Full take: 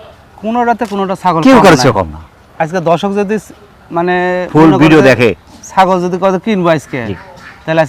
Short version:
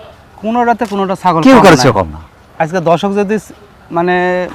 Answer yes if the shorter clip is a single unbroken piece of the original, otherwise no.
yes